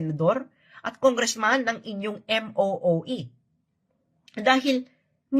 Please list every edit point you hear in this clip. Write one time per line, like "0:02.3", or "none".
0:02.8